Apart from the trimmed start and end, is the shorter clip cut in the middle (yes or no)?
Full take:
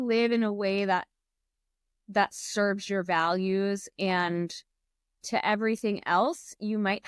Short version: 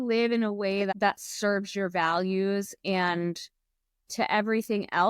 yes